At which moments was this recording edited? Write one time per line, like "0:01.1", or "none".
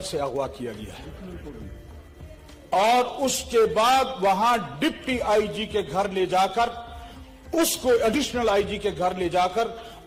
none